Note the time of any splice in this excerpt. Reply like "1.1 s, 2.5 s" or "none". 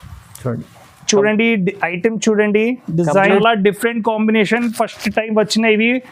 3.4 s